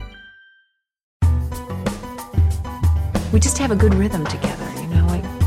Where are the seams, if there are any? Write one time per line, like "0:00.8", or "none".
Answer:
0:01.3